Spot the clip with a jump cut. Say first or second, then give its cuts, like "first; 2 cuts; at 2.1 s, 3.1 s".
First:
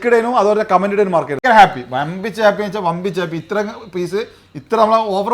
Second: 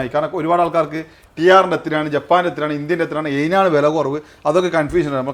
first; 1 cut; at 1.4 s